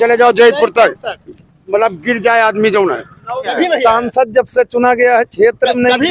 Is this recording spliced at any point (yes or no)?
yes